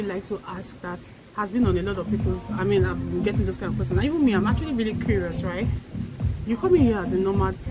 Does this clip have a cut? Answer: no; 0 cuts

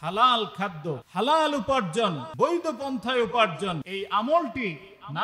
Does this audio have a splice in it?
yes; 3 cuts; at 1.0 s, 2.2 s, 3.9 s

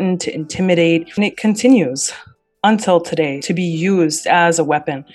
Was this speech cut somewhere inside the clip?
yes; 1 cut; at 1.1 s

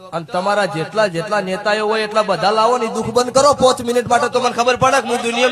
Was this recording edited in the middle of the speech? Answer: no; 0 cuts

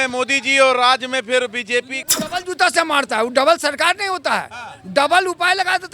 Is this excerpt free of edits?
no; 1 cut; at 2.0 s

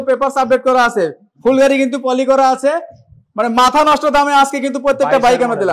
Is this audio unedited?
yes; 0 cuts

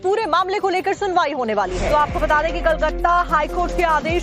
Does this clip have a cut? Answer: yes; 1 cut; at 1.3 s

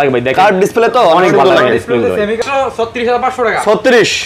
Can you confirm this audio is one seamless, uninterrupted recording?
no; 1 cut; at 2.4 s

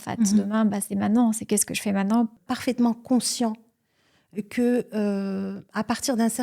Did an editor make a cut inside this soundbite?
yes; 1 cut; at 2.4 s

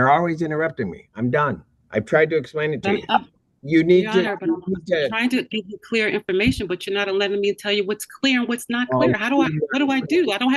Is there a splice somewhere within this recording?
no; 0 cuts

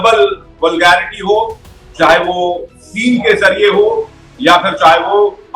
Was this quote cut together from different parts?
no; 0 cuts

